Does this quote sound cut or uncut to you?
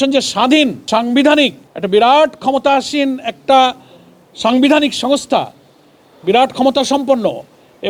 uncut